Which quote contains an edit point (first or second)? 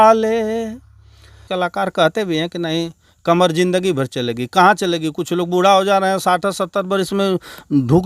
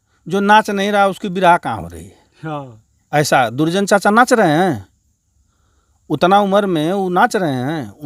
first